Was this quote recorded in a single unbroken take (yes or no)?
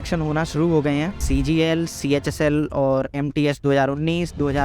no